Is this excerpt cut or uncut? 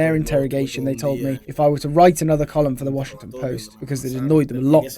cut